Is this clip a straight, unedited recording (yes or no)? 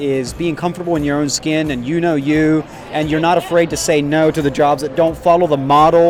yes